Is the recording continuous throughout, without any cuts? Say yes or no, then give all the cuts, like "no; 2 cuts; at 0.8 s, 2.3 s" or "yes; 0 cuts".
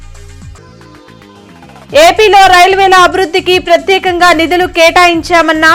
no; 1 cut; at 1.9 s